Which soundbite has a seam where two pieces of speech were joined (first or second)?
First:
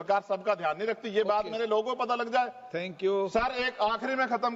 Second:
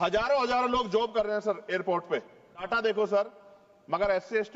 second